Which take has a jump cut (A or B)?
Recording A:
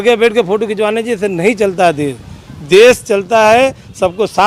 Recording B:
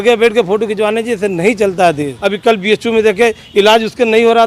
B